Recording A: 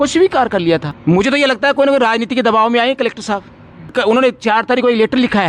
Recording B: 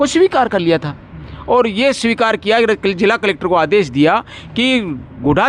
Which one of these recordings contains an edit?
A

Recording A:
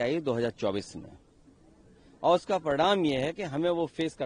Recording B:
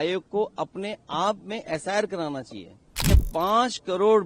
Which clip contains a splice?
B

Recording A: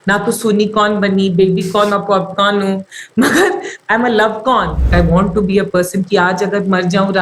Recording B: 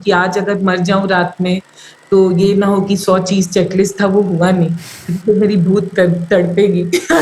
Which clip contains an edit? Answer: A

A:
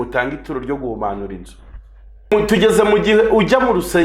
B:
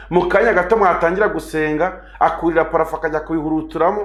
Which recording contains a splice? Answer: A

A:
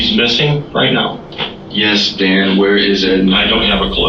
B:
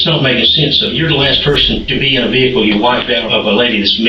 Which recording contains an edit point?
B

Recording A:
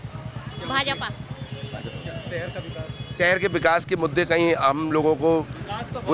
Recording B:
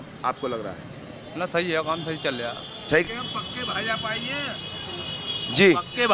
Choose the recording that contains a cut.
B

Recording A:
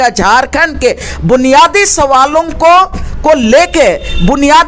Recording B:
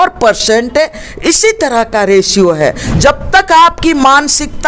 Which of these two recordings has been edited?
B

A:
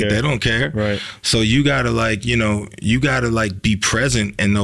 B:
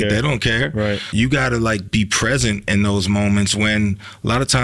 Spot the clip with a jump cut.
B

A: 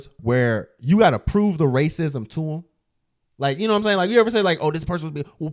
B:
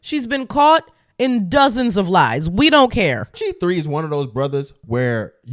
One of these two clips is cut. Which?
B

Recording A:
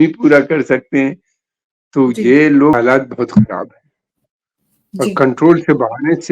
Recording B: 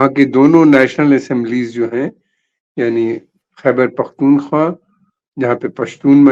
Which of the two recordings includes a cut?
A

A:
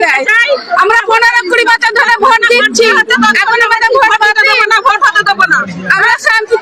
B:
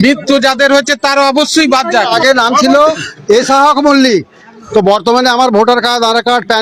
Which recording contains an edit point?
B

